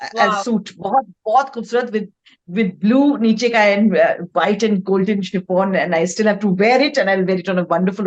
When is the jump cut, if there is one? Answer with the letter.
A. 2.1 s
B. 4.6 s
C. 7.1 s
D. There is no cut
D